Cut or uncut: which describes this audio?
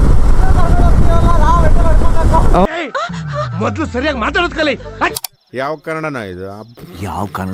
uncut